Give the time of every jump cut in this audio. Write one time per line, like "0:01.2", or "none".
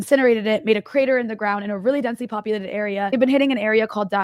0:03.1